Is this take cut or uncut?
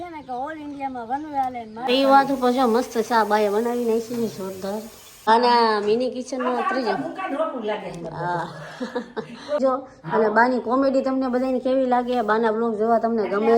cut